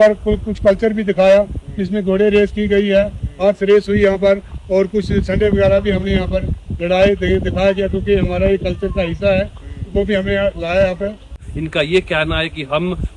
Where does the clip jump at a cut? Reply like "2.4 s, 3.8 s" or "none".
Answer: 11.3 s